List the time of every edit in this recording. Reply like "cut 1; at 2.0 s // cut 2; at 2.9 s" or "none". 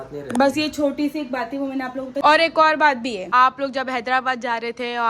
cut 1; at 2.2 s // cut 2; at 3.2 s